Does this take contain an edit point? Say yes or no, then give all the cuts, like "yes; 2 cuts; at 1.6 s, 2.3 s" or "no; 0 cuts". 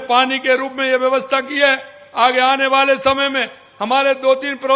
no; 0 cuts